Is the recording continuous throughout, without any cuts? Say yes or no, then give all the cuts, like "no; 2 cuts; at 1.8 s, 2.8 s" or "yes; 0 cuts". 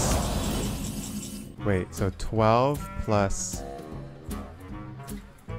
no; 1 cut; at 1.5 s